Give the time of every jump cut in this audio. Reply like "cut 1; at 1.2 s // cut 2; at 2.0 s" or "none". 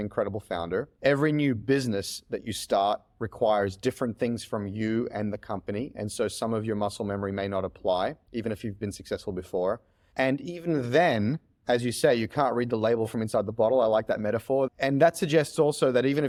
none